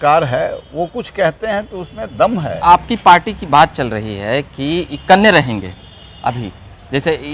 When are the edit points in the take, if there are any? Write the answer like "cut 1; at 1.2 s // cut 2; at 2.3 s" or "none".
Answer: cut 1; at 2.6 s